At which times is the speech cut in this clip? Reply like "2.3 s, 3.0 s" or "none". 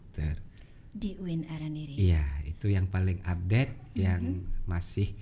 none